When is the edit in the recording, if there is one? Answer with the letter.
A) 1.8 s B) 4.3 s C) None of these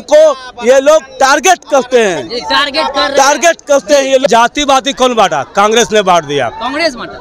B